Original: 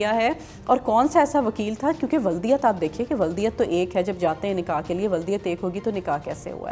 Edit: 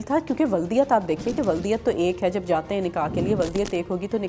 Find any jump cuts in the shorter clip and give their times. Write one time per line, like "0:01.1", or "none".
none